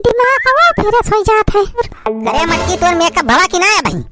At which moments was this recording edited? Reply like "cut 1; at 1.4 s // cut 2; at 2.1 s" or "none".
cut 1; at 1.9 s